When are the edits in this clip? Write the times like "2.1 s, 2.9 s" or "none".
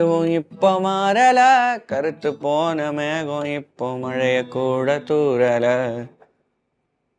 none